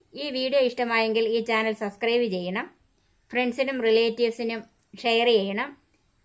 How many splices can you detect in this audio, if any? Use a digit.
0